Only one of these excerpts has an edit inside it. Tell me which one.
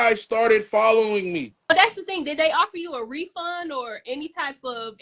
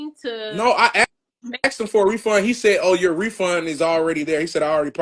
first; 1 cut; at 1.8 s

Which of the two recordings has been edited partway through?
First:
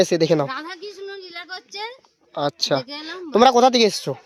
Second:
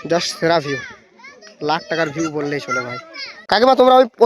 second; 1 cut; at 3.3 s

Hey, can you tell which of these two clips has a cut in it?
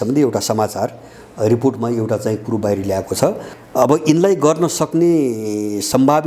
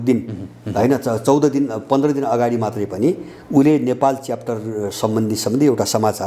first; 1 cut; at 3.5 s

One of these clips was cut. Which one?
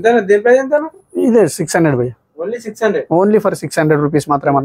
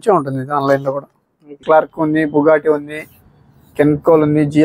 second; 1 cut; at 1.5 s

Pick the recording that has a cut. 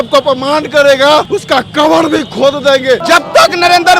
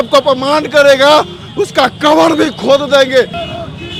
first; 2 cuts; at 1.3 s, 3.0 s

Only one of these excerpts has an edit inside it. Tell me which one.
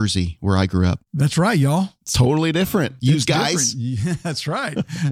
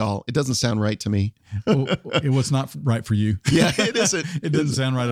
first; 2 cuts; at 1.1 s, 2.9 s

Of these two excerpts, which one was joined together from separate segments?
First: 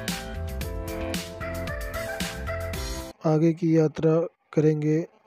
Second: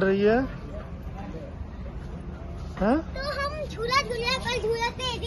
first; 1 cut; at 3.0 s

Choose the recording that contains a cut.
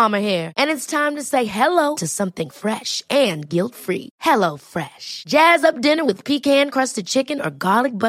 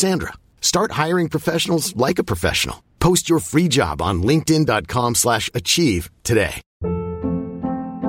second; 1 cut; at 6.7 s

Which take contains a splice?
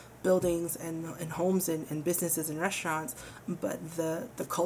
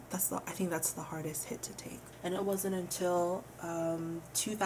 second; 1 cut; at 2.1 s

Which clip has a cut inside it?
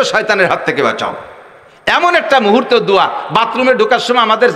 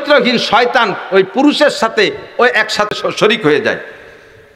second; 1 cut; at 2.9 s

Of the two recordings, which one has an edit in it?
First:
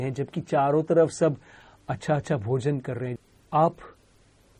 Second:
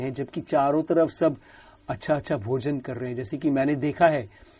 first; 1 cut; at 3.2 s

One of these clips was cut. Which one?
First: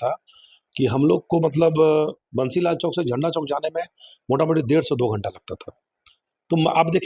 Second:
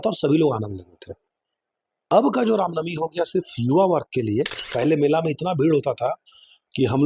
second; 1 cut; at 4.6 s

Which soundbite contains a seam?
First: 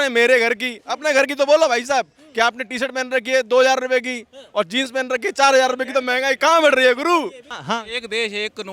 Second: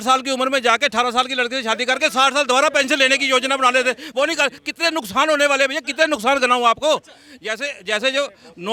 first; 1 cut; at 7.5 s

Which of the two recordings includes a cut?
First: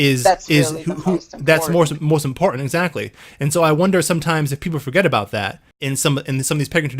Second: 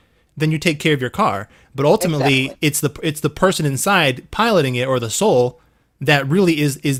first; 1 cut; at 5.8 s

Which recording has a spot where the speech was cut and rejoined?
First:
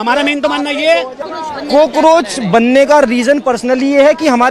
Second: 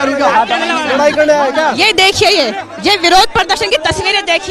first; 1 cut; at 1.2 s

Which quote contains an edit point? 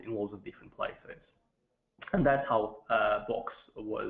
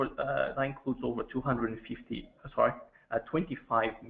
second; 1 cut; at 2.4 s

